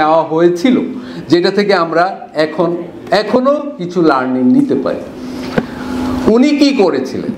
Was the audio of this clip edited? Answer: no; 0 cuts

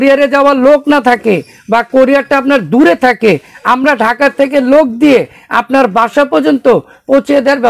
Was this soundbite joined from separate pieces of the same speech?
no; 0 cuts

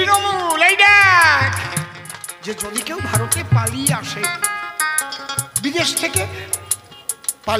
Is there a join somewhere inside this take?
yes; 1 cut; at 2.4 s

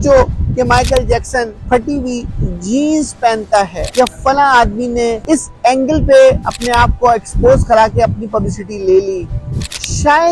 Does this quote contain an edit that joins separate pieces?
yes; 3 cuts; at 1.6 s, 3.8 s, 5.2 s

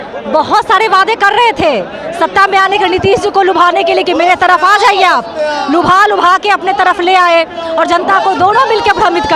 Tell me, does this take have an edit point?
no; 0 cuts

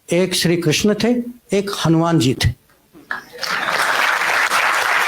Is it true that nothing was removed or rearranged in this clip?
yes; 0 cuts

